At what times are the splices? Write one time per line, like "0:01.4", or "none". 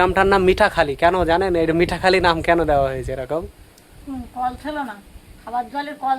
0:04.0